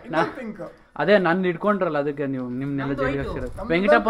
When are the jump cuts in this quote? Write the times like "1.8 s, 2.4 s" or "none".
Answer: none